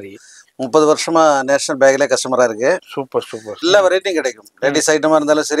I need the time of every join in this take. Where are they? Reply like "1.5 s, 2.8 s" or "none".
3.6 s

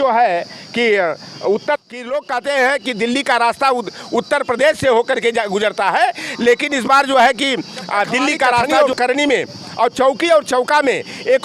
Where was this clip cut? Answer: 1.8 s, 8.7 s

